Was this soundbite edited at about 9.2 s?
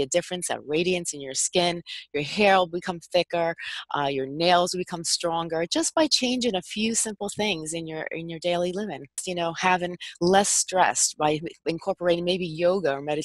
yes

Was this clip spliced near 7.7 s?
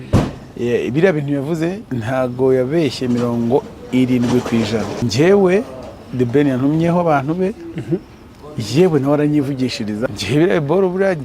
no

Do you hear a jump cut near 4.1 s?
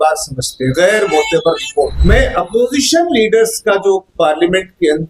no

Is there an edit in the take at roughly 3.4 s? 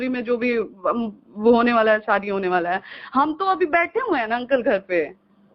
no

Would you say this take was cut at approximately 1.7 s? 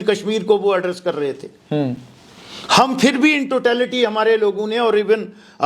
no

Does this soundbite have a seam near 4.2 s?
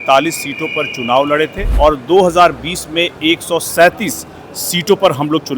no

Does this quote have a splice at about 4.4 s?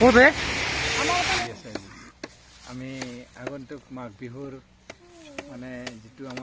no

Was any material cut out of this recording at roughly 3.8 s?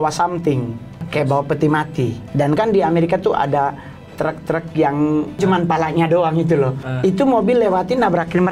no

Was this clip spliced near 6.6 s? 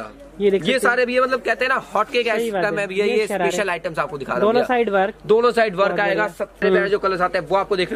yes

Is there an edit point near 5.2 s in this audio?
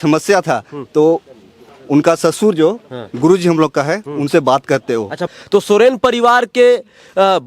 yes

